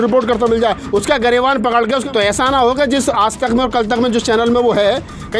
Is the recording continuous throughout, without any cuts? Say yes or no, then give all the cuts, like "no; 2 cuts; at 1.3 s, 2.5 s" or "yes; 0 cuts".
no; 1 cut; at 2.0 s